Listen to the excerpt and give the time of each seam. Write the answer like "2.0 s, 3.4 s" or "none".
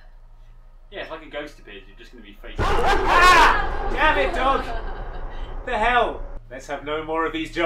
none